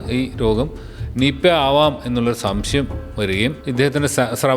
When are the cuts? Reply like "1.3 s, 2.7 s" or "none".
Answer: 3.6 s